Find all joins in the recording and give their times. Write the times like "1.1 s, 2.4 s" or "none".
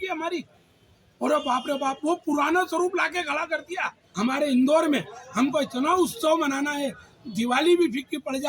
4.0 s